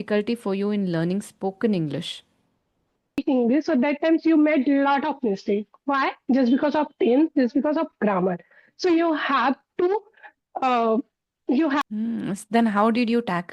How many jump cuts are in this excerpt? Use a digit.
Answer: 2